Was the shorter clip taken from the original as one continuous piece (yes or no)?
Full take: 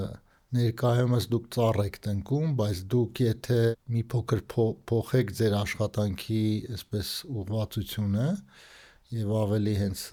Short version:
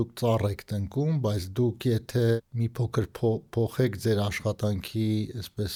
yes